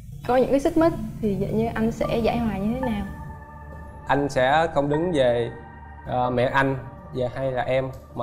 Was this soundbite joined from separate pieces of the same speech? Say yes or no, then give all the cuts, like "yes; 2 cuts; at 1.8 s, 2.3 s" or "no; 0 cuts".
no; 0 cuts